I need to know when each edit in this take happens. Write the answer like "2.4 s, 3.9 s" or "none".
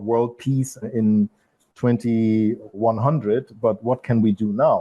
2.8 s